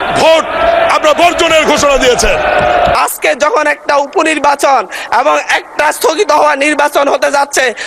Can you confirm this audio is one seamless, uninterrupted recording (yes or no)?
no